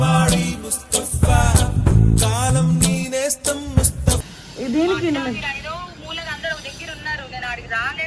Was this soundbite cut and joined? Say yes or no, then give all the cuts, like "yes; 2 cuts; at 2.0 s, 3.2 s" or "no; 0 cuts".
no; 0 cuts